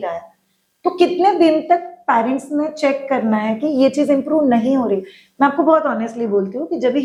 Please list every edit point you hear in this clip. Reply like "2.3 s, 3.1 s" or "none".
none